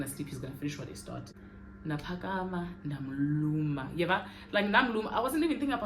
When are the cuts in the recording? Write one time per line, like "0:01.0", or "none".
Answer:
0:01.3